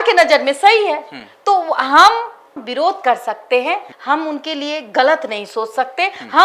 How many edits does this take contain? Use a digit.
0